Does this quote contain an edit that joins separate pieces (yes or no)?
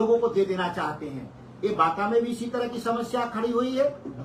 no